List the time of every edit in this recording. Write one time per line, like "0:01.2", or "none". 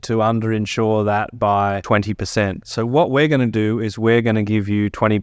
0:01.8